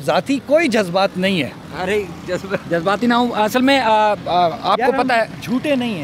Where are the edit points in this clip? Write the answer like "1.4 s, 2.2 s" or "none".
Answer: 1.6 s, 2.6 s

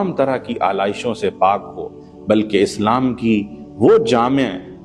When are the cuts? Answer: none

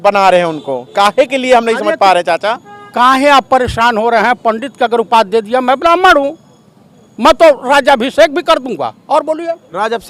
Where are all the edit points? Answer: none

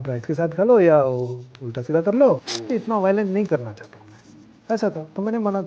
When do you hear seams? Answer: 2.5 s

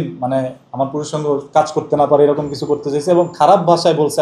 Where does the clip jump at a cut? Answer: none

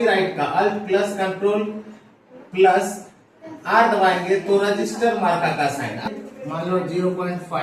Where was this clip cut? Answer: 6.1 s

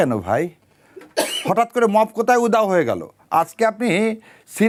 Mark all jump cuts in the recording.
none

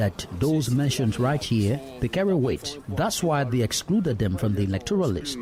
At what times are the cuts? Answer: none

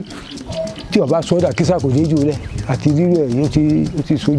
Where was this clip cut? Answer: none

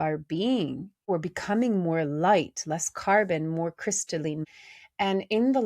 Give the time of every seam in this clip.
1.1 s, 4.4 s

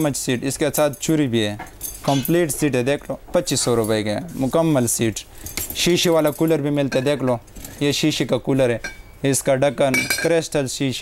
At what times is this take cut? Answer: none

